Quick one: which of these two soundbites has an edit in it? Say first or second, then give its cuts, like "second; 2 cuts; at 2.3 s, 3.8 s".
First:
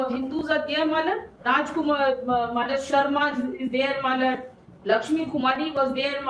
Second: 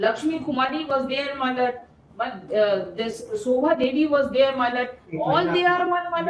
first; 1 cut; at 1.3 s